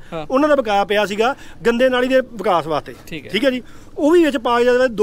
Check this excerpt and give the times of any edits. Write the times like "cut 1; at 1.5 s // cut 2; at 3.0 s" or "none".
none